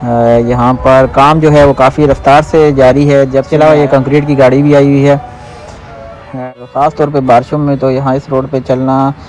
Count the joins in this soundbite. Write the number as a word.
two